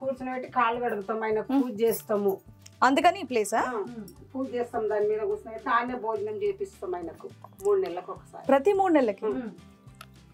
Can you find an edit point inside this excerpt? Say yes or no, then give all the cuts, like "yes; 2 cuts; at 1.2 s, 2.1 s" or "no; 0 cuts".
no; 0 cuts